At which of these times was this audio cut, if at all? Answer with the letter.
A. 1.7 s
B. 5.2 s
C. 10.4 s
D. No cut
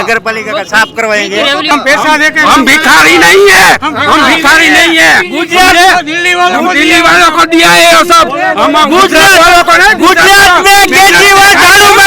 A